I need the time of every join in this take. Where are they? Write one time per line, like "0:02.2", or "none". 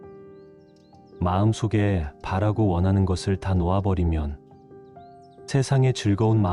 0:00.9